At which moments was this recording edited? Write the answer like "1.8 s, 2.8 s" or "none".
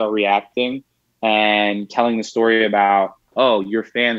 none